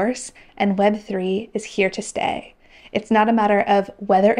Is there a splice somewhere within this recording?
no; 0 cuts

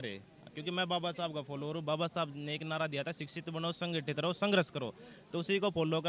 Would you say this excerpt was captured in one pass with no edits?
yes; 0 cuts

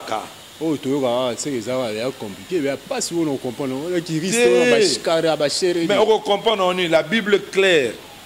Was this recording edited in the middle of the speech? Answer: no; 0 cuts

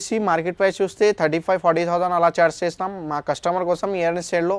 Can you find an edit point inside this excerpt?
no; 0 cuts

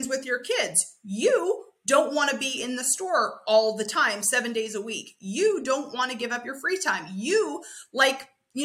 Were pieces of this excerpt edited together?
no; 0 cuts

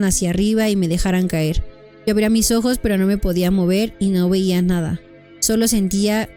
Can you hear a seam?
no; 0 cuts

